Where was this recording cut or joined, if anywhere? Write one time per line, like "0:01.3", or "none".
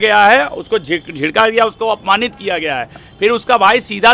none